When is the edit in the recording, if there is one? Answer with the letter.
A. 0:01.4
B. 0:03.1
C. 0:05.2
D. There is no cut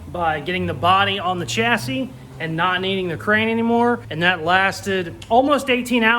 C